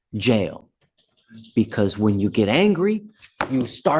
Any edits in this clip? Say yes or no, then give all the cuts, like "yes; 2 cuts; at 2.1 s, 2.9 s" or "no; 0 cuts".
no; 0 cuts